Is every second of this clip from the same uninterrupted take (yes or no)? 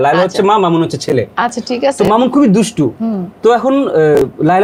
yes